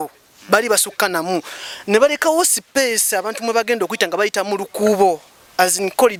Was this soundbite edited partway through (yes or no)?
no